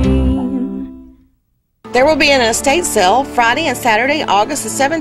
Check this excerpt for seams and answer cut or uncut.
cut